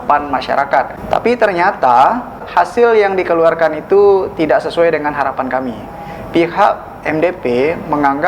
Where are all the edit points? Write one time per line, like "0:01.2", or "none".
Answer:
0:00.9
0:02.4